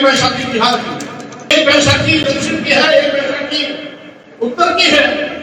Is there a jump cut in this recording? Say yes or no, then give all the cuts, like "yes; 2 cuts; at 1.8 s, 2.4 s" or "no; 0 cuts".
yes; 1 cut; at 1.5 s